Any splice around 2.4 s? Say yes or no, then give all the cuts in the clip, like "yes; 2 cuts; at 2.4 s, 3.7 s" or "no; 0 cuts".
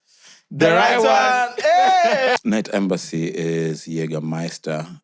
yes; 1 cut; at 2.4 s